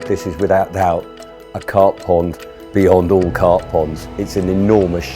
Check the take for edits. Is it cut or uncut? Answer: cut